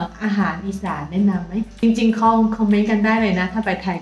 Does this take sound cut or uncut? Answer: cut